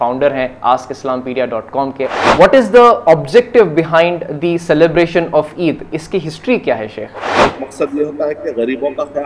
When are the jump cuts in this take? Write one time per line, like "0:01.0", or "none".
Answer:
0:02.1
0:07.4